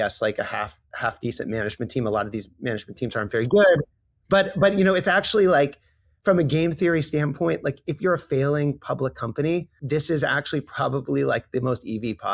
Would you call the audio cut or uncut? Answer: cut